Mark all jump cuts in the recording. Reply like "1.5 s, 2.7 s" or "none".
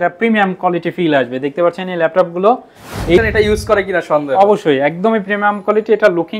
3.2 s